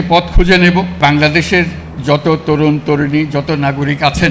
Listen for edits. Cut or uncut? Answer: cut